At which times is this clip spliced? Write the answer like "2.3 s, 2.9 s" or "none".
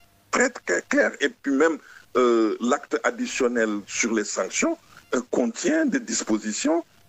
none